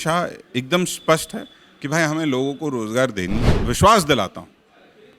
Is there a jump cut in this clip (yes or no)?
yes